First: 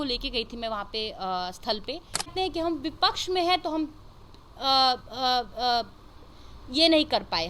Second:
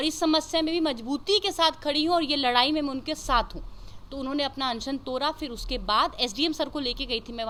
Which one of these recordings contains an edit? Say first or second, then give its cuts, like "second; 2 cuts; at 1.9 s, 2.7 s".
first; 1 cut; at 2.3 s